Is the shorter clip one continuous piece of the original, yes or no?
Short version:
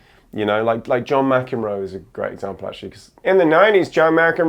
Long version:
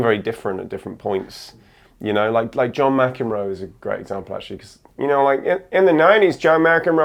no